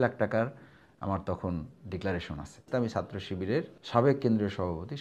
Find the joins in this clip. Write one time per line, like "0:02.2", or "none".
0:02.7
0:03.8